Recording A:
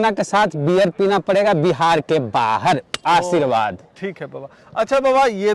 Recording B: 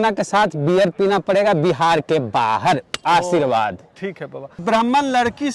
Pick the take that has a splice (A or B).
B